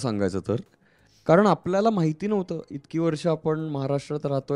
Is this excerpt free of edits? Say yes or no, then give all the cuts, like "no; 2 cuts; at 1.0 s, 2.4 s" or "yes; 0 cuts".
yes; 0 cuts